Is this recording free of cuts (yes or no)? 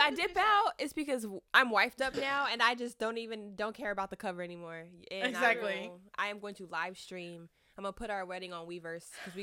no